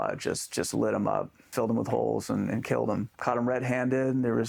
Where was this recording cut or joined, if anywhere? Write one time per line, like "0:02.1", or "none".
0:01.4
0:03.1